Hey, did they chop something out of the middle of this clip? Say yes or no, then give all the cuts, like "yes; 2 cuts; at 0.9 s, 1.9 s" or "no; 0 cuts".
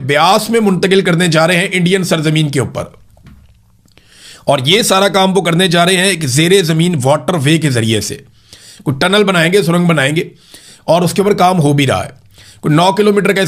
no; 0 cuts